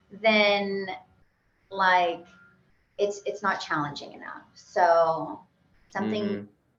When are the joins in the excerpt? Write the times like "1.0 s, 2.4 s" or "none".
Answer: none

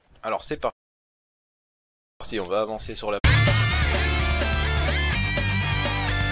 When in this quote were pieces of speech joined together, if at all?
none

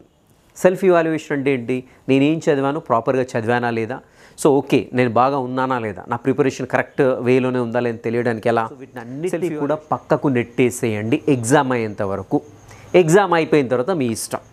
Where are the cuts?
9.1 s

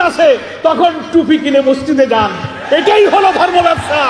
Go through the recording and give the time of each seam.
none

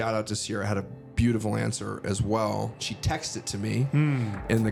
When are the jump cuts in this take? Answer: none

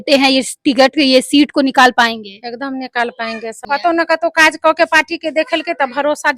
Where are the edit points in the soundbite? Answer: 3.6 s

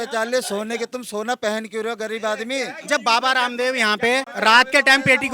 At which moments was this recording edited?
2.8 s, 4.3 s

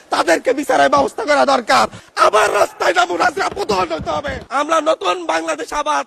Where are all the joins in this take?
2.0 s, 4.4 s

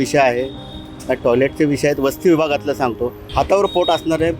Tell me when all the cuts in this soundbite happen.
3.2 s

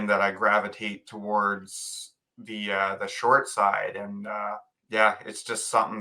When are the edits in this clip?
4.7 s

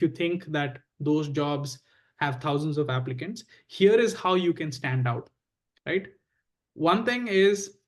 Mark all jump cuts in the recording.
none

